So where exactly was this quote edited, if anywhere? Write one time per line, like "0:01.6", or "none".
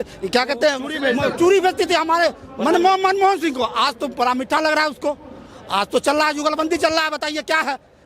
none